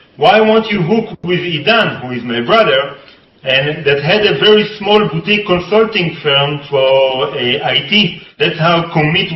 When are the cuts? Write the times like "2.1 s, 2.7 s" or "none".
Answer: 8.2 s